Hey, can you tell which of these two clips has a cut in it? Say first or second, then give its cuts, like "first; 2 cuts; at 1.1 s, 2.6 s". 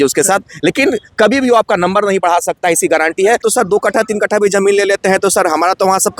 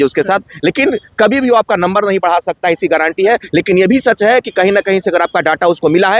first; 1 cut; at 3.4 s